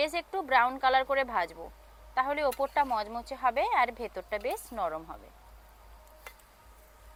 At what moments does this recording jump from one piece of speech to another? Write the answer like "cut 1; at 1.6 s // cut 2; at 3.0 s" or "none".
none